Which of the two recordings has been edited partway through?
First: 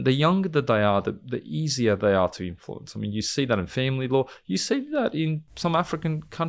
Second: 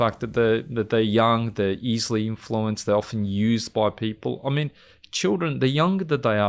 first; 1 cut; at 5.5 s

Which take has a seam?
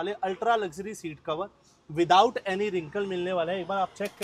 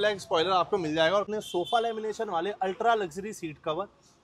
second; 1 cut; at 1.3 s

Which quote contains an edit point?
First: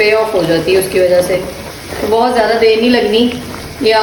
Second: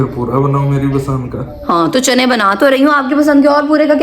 second; 1 cut; at 1.5 s

